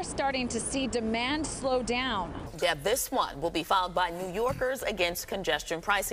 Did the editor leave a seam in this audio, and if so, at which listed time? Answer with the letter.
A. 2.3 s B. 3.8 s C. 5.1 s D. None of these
A